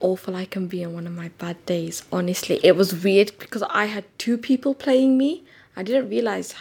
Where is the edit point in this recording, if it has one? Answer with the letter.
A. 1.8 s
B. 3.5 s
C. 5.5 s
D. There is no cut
D